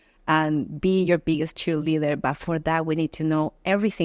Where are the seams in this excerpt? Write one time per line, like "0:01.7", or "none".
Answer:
none